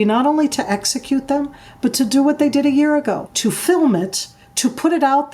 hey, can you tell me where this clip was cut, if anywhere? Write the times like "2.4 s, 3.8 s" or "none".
3.3 s